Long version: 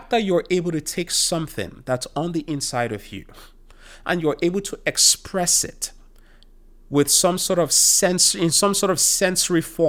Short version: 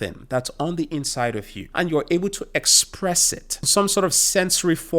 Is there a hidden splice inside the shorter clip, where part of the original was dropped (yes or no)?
yes